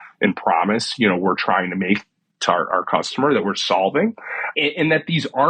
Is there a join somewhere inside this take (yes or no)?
no